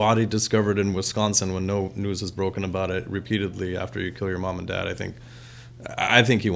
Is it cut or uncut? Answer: uncut